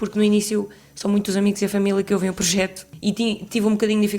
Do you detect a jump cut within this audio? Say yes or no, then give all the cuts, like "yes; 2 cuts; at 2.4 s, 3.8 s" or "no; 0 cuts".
yes; 1 cut; at 2.8 s